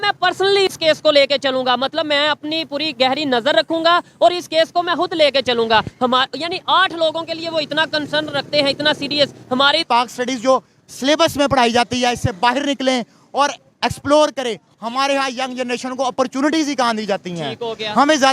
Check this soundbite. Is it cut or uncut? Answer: cut